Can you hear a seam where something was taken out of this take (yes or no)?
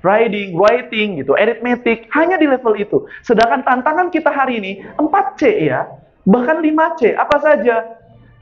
no